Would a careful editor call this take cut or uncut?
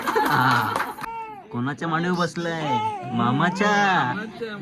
cut